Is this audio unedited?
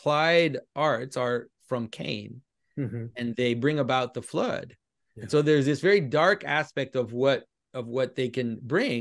no; 1 cut; at 1.5 s

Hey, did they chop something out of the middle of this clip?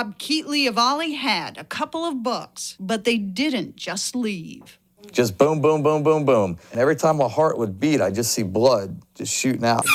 no; 0 cuts

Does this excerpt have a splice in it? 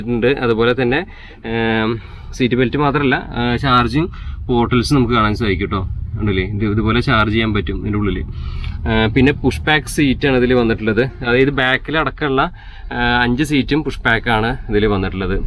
no; 0 cuts

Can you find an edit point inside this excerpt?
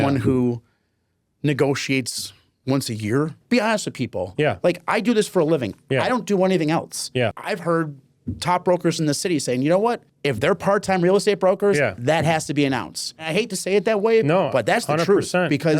yes; 4 cuts; at 3.4 s, 7.4 s, 10.1 s, 13.2 s

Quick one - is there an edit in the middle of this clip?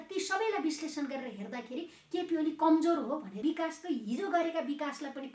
yes; 1 cut; at 3.3 s

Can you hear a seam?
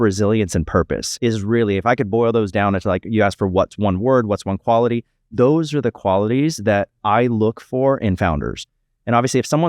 yes; 1 cut; at 1.1 s

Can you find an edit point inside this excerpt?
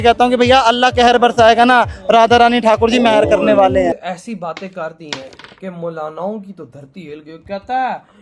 yes; 1 cut; at 4.1 s

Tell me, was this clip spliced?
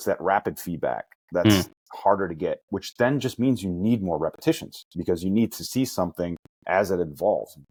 no; 0 cuts

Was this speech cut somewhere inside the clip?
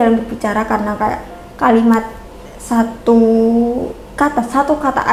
no; 0 cuts

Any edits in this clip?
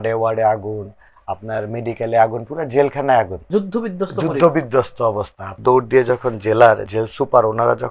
yes; 3 cuts; at 3.5 s, 5.4 s, 6.9 s

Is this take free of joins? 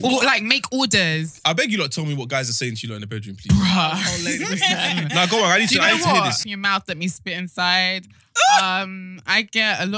no; 1 cut; at 6.4 s

